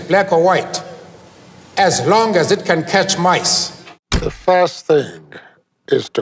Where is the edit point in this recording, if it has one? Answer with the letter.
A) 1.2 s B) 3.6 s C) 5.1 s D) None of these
D